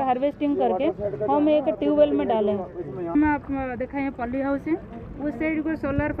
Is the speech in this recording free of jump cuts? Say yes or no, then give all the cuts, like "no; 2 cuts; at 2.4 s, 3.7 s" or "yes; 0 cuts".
no; 1 cut; at 3.1 s